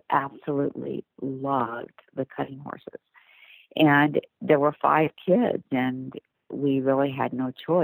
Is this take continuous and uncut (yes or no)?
yes